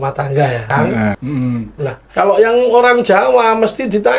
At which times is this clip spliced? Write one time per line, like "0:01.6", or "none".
0:01.2